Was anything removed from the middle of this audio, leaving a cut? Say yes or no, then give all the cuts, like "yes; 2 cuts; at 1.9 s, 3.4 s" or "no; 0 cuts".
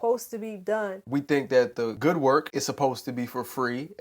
yes; 3 cuts; at 1.0 s, 1.9 s, 2.5 s